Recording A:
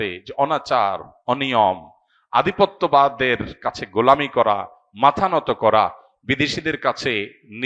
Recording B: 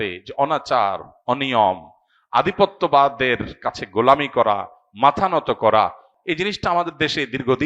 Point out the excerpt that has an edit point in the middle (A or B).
B